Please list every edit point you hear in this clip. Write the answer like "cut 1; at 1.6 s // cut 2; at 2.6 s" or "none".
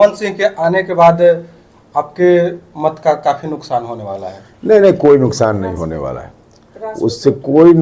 none